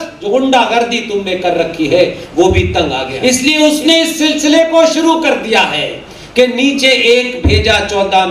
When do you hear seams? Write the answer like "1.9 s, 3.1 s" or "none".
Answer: 3.1 s

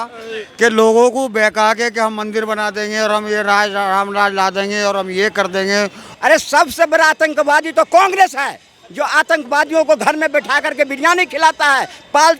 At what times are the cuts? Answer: 6.0 s

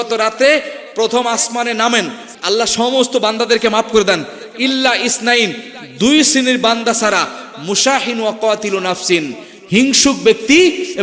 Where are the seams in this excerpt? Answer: 2.3 s

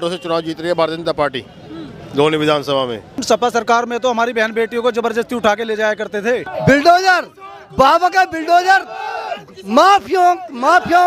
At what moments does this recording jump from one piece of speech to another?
3.2 s, 6.5 s

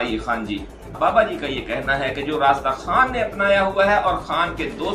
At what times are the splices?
0.9 s

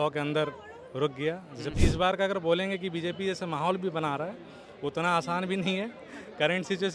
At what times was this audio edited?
1.8 s

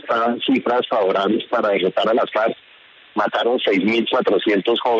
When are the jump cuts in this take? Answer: none

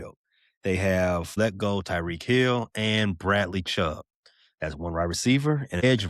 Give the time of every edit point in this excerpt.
1.3 s

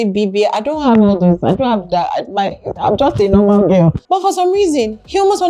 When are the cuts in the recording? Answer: 4.0 s

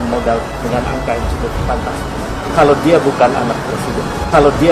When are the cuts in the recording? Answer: none

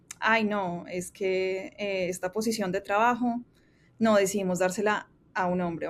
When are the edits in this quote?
none

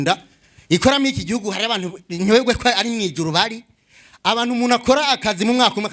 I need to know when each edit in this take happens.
none

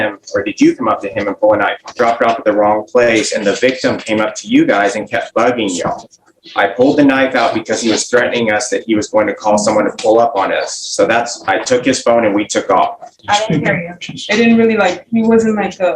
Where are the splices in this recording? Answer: 1.9 s, 13.1 s

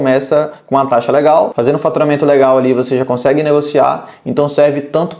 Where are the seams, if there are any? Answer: none

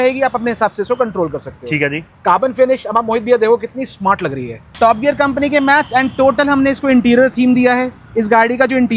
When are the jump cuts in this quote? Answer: 4.6 s

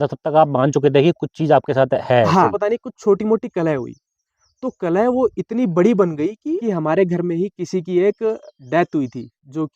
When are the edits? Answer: 2.5 s, 6.6 s

